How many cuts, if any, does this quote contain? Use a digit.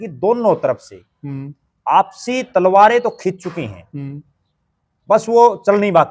0